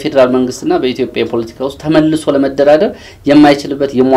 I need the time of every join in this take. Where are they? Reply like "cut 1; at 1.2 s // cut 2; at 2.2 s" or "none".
none